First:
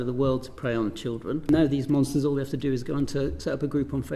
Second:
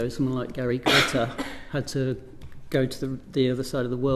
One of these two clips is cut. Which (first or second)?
first